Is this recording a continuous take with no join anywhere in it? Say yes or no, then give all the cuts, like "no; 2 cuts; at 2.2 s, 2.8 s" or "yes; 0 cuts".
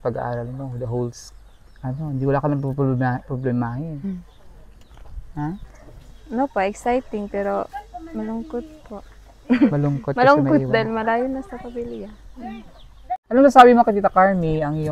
no; 1 cut; at 13.2 s